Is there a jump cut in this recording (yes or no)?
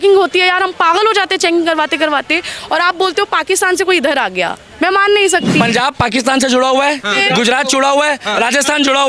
yes